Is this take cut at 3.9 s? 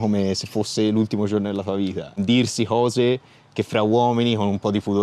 no; 1 cut; at 2.1 s

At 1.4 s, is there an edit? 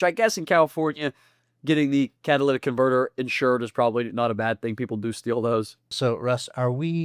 no; 1 cut; at 5.8 s

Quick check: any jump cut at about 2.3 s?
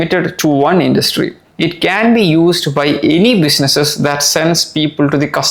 no; 0 cuts

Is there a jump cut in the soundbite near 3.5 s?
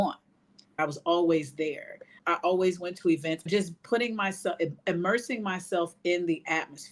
yes; 3 cuts; at 0.8 s, 2.2 s, 3.5 s

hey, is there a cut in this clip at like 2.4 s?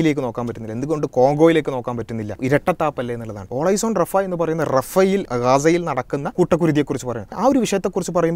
yes; 5 cuts; at 2.4 s, 3.5 s, 5.3 s, 6.3 s, 7.4 s

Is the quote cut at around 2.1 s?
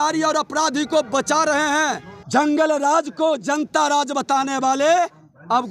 yes; 1 cut; at 2.1 s

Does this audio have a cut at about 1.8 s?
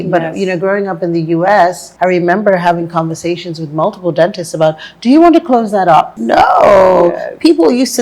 yes; 2 cuts; at 1.8 s, 6.2 s

